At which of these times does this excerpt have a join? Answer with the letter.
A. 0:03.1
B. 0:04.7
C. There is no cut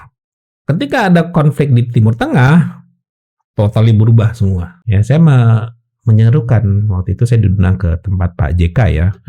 B